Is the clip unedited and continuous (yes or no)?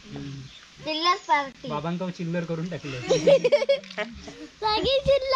yes